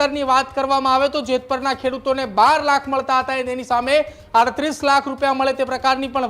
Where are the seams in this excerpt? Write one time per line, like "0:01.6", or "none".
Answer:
none